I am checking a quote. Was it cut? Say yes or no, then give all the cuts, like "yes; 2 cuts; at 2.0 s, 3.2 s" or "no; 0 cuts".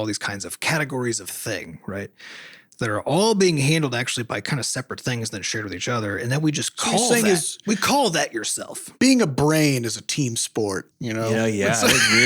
yes; 2 cuts; at 8.9 s, 11.0 s